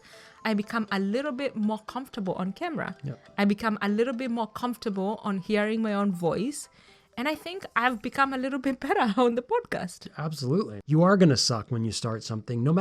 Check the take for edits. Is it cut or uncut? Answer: cut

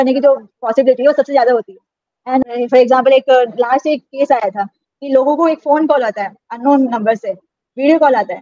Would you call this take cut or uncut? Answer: cut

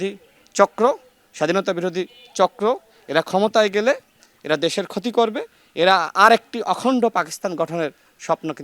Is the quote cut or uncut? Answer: uncut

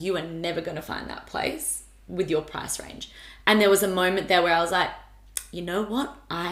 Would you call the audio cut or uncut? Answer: uncut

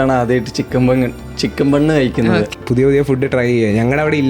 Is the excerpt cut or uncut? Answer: cut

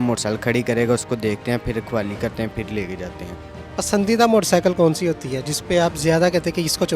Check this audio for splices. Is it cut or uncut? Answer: uncut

